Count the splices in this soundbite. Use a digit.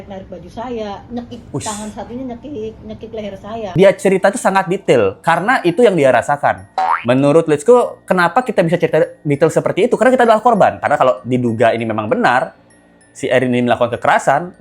2